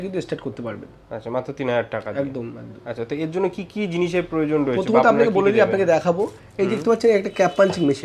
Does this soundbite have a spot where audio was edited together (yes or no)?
no